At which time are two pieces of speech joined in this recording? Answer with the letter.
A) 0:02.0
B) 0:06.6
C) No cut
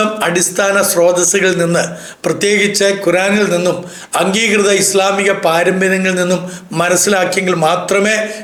C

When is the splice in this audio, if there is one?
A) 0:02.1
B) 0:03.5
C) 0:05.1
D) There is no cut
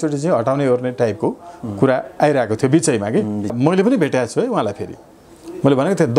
B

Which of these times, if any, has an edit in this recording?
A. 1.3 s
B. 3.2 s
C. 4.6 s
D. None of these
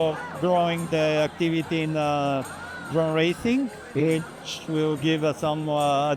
D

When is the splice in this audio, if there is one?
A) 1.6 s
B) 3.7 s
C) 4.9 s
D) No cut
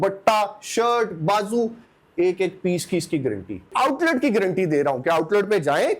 B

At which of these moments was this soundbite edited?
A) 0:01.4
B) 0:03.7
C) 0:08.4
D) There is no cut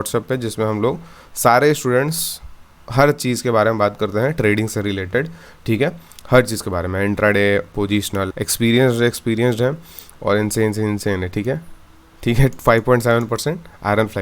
C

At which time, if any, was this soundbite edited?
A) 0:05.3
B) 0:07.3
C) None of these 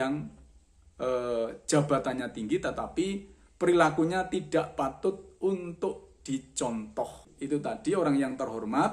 B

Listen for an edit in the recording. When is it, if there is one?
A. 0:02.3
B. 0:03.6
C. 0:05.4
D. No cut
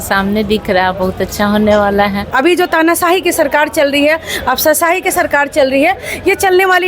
A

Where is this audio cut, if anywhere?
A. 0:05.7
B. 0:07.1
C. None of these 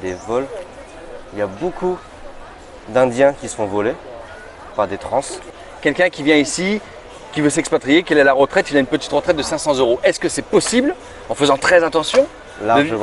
A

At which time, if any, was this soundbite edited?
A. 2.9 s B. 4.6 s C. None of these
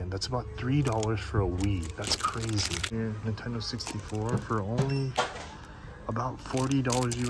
A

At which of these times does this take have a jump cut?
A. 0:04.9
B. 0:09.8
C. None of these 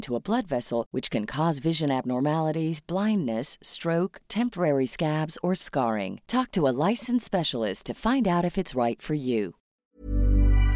B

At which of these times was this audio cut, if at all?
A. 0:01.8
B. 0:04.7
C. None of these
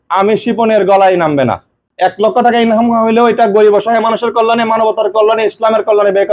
A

